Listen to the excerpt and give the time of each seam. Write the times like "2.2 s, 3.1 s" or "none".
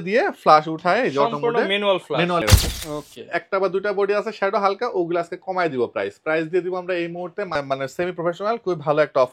2.4 s, 7.6 s

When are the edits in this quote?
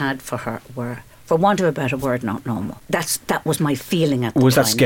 1.1 s, 2.7 s

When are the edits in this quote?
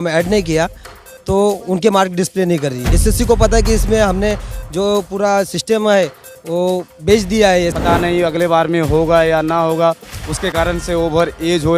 2.9 s, 7.8 s

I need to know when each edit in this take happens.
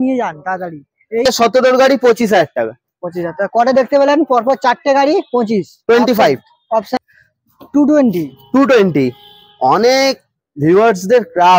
1.2 s, 7.0 s

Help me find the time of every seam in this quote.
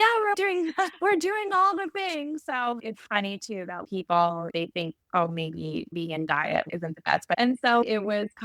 7.4 s

